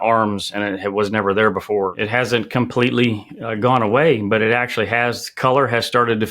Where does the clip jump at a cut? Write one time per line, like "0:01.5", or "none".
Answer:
0:02.0